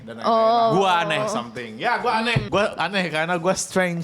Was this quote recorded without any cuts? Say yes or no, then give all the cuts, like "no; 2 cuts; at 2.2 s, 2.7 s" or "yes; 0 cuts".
no; 1 cut; at 2.5 s